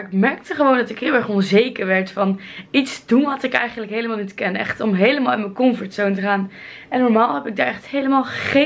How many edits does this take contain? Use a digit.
0